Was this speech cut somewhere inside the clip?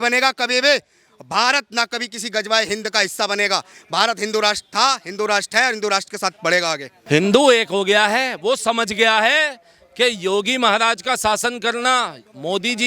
yes; 1 cut; at 6.9 s

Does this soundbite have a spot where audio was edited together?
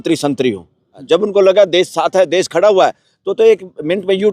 yes; 1 cut; at 1.0 s

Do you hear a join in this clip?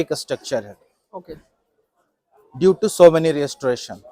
no; 0 cuts

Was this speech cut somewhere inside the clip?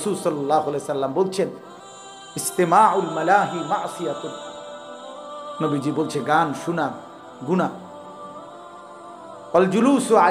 no; 0 cuts

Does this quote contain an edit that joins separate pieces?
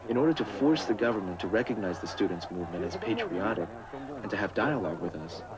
yes; 1 cut; at 3.7 s

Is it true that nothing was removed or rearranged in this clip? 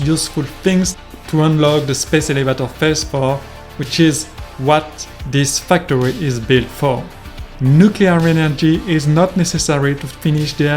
yes; 0 cuts

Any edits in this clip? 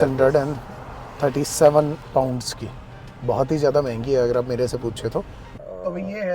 yes; 1 cut; at 5.4 s

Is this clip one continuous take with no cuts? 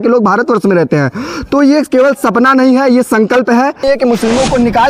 no; 1 cut; at 3.8 s

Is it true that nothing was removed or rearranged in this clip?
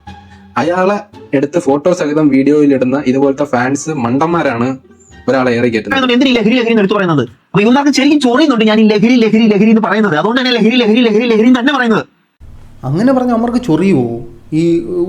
no; 1 cut; at 5.9 s

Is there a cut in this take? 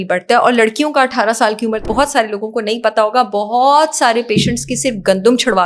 yes; 1 cut; at 1.9 s

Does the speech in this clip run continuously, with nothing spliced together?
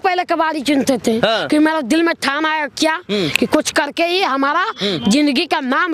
yes; 0 cuts

